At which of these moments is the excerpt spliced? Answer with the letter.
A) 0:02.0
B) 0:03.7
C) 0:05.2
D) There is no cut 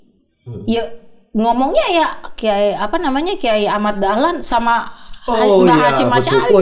D